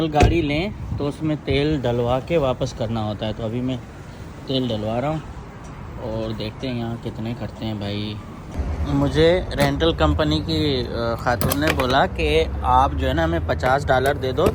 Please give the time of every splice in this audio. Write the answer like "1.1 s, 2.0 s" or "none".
none